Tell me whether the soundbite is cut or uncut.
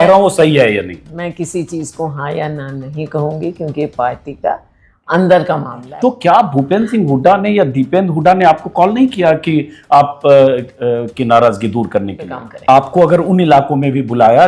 cut